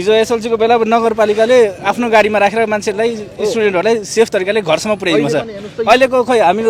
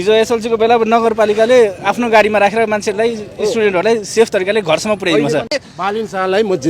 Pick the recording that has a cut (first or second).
second